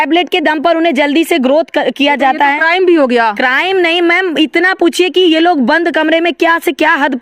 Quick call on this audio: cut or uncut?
uncut